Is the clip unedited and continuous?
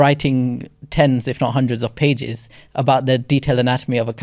yes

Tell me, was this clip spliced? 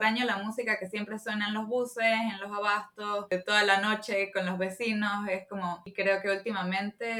yes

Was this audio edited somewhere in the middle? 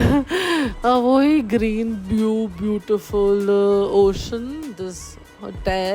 no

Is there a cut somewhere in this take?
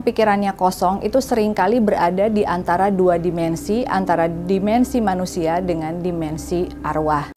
no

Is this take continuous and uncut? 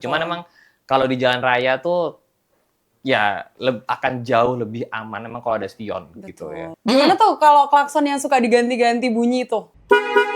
no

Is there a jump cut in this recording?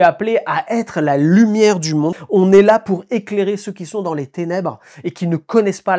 yes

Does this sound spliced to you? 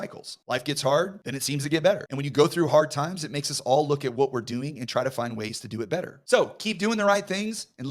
yes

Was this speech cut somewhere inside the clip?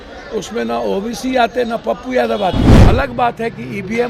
yes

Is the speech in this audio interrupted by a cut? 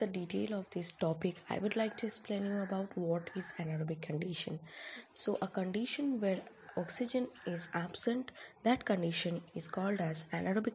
no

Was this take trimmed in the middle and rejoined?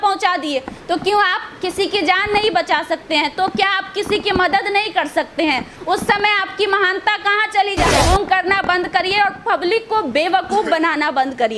yes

